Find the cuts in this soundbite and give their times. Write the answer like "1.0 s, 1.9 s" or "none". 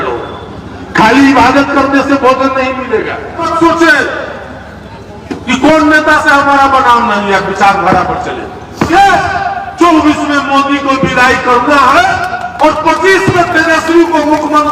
3.5 s, 8.9 s

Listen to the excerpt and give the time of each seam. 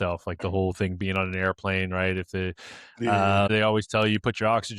3.5 s

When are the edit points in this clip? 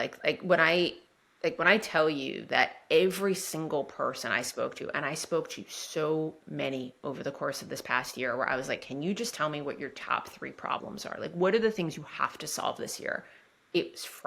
none

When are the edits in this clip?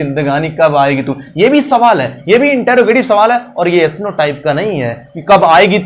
none

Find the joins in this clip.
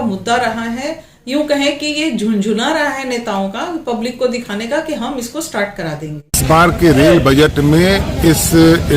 6.4 s

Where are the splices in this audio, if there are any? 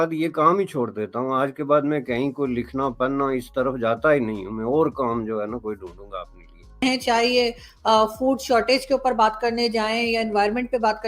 6.8 s

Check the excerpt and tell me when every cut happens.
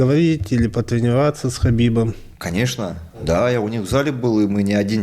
3.2 s

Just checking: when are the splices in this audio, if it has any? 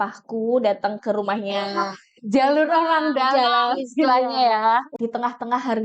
4.9 s

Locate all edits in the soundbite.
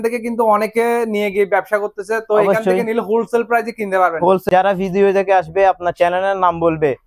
4.5 s

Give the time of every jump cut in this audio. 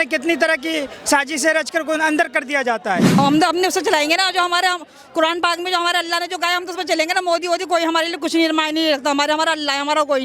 3.2 s

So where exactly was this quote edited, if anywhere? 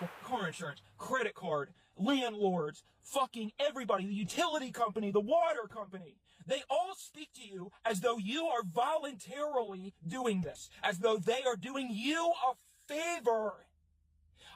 none

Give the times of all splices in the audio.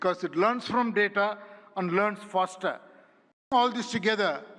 3.5 s

